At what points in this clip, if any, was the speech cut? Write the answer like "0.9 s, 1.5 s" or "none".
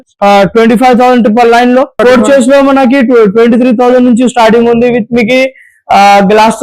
1.9 s